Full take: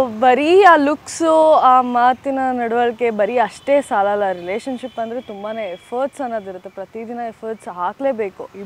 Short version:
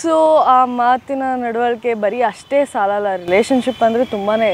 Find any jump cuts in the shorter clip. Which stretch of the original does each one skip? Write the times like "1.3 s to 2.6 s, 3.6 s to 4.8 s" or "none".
none